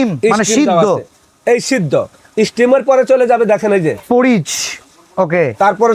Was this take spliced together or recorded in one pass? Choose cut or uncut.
uncut